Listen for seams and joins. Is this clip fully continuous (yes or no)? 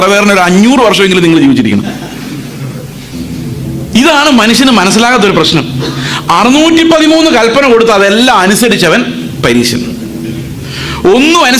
no